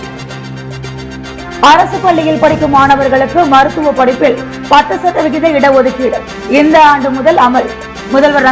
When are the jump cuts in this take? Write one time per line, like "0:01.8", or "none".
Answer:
0:00.9